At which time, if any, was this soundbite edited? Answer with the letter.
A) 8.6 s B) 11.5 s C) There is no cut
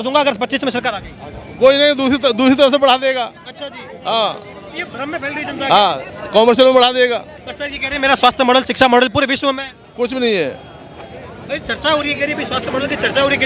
C